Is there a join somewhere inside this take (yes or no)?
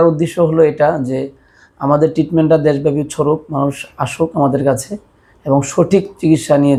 no